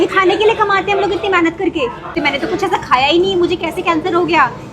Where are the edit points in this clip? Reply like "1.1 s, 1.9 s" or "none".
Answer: 2.1 s